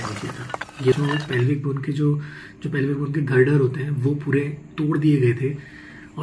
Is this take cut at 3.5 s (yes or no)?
no